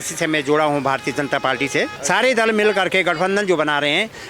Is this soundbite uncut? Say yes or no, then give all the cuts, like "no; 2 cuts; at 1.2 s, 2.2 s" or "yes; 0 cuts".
no; 1 cut; at 2.0 s